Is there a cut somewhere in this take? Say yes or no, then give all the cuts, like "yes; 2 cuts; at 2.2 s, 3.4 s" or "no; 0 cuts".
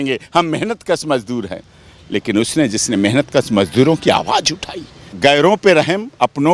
yes; 1 cut; at 5.0 s